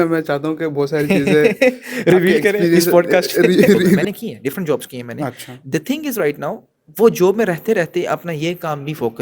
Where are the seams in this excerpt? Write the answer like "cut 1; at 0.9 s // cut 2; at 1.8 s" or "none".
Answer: cut 1; at 4.0 s